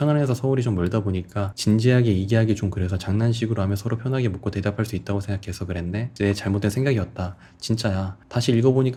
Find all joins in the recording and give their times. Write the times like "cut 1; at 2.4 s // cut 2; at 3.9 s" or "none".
none

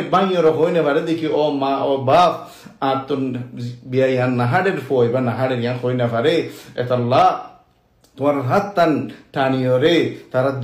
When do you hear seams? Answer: cut 1; at 8.0 s

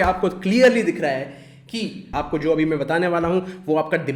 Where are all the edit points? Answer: cut 1; at 2.0 s

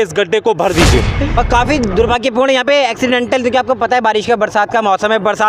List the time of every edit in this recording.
cut 1; at 1.0 s

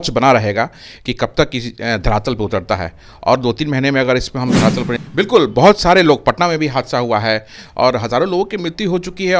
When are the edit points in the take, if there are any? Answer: cut 1; at 5.0 s

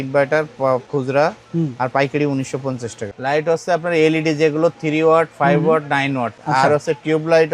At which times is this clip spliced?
cut 1; at 3.1 s // cut 2; at 6.3 s

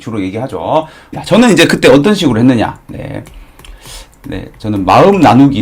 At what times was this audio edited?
cut 1; at 1.1 s

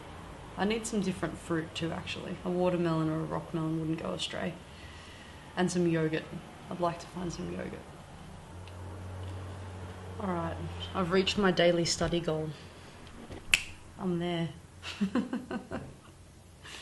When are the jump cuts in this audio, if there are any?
cut 1; at 7.0 s

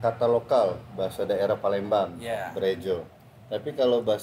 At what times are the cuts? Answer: none

